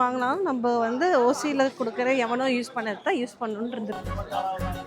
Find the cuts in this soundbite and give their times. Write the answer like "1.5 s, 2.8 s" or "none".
3.8 s